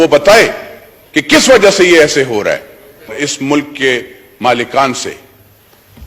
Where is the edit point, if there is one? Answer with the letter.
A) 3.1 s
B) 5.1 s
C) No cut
A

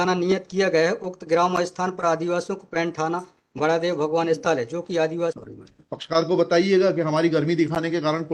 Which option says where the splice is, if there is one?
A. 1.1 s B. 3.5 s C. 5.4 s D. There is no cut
C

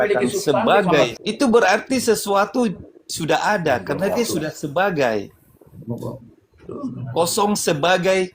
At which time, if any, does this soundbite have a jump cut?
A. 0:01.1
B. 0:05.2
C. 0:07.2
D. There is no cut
A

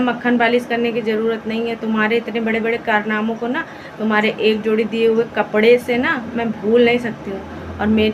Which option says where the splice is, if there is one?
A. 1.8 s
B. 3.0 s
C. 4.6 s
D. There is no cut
D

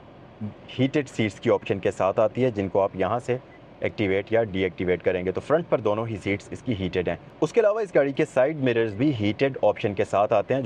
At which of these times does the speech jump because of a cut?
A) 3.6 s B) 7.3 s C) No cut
C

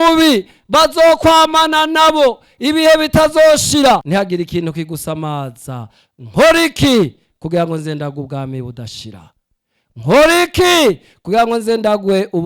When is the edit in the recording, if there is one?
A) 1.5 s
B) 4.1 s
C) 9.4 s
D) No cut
B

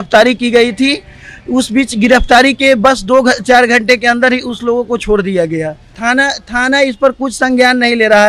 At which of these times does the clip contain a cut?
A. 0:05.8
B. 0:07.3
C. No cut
A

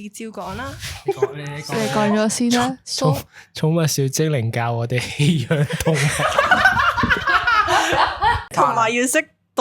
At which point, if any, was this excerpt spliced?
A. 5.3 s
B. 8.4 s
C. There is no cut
B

